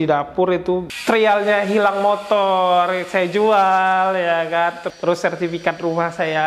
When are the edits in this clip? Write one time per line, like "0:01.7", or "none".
0:00.9
0:04.9